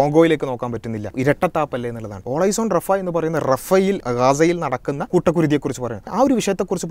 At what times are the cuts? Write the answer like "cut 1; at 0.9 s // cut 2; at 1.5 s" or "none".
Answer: cut 1; at 1.1 s // cut 2; at 2.2 s // cut 3; at 4.0 s // cut 4; at 5.0 s // cut 5; at 6.1 s